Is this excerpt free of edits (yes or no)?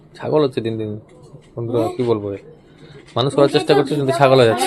yes